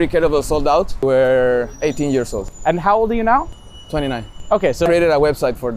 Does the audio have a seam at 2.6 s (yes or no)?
no